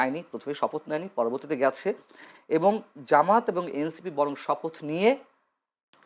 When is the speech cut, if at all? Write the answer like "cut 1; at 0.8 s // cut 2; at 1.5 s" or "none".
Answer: none